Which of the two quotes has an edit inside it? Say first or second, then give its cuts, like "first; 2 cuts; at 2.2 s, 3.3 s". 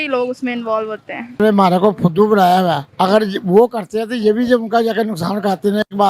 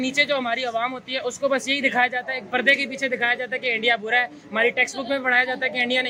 first; 1 cut; at 1.4 s